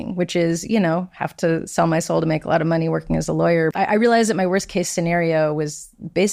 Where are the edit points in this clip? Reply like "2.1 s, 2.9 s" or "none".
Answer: none